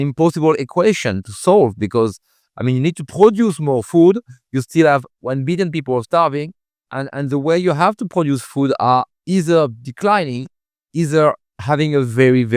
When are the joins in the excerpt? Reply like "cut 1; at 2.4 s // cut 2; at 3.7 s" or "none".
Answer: none